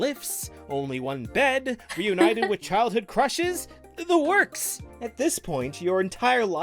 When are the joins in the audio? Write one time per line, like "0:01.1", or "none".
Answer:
0:04.8